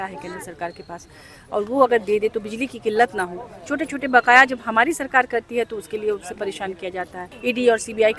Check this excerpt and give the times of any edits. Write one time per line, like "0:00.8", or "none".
0:07.3